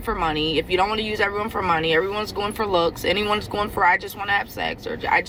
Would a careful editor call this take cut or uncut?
uncut